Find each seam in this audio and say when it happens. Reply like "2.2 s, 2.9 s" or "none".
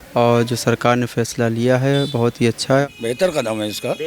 2.8 s